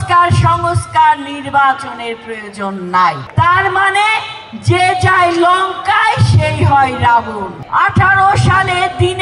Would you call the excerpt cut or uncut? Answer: cut